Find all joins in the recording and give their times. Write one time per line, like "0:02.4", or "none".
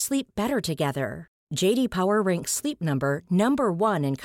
none